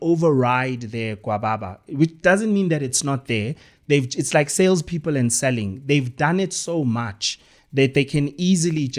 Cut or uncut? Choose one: uncut